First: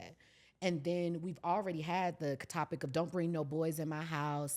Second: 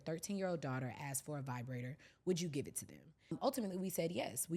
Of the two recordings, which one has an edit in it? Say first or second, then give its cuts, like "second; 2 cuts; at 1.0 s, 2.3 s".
second; 1 cut; at 3.3 s